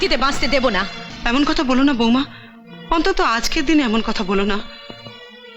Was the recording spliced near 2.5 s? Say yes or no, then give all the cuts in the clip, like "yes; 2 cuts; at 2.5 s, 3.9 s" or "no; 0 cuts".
no; 1 cut; at 1.1 s